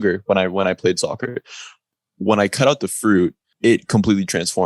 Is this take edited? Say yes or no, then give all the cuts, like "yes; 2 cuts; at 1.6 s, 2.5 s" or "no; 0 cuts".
yes; 2 cuts; at 1.8 s, 3.5 s